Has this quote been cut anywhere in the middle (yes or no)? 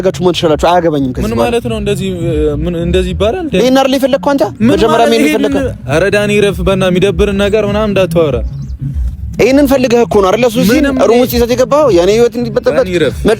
no